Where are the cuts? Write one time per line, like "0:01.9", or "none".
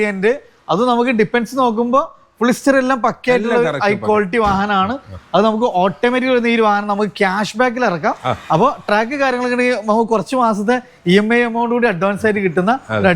none

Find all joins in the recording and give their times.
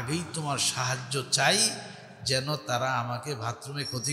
none

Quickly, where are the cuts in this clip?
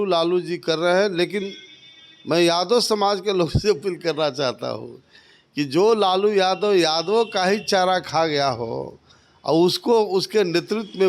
none

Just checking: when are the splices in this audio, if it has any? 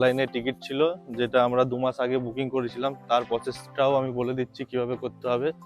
none

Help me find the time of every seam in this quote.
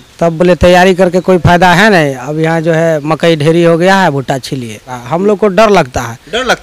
0:05.0

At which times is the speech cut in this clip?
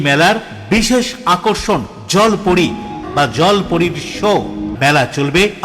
0:03.0
0:04.7

